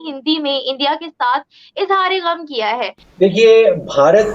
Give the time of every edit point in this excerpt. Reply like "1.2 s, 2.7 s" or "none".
3.1 s